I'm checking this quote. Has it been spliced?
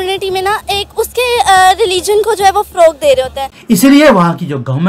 yes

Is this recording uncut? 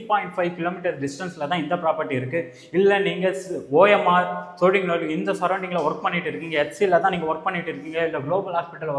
yes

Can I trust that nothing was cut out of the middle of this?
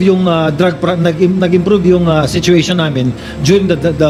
yes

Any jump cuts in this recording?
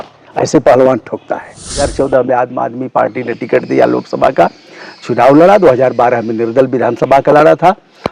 yes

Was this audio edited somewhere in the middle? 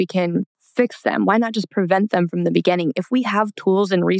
no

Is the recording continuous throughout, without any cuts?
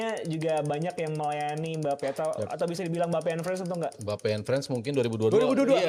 yes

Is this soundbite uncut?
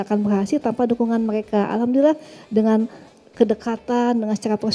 yes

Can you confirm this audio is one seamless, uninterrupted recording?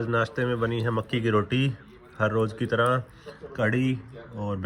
yes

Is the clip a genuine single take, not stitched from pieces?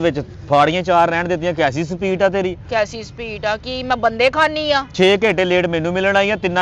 yes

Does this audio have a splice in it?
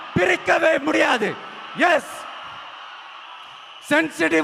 no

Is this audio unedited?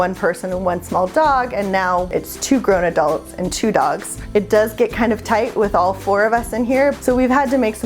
no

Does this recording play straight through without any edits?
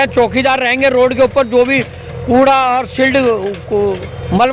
yes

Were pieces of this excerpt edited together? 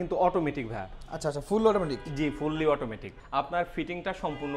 yes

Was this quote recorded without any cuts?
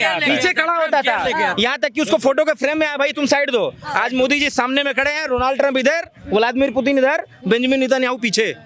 yes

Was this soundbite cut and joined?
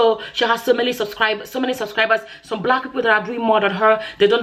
no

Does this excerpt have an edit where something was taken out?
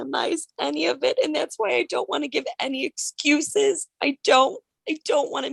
no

